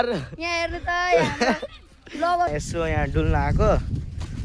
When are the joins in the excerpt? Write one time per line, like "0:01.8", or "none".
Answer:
0:02.5